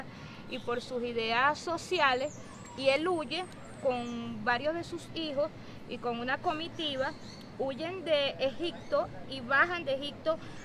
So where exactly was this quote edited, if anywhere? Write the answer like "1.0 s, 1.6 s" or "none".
3.0 s